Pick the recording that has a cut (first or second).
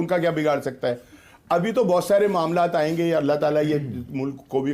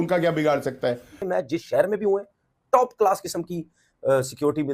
second